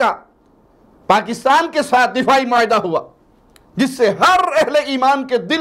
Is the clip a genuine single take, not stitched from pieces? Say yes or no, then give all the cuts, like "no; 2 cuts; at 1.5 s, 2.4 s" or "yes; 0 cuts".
yes; 0 cuts